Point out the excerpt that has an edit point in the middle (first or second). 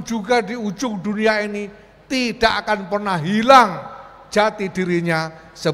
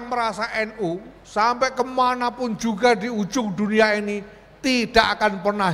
second